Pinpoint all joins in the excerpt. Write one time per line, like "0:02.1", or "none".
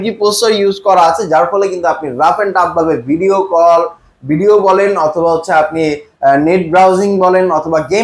none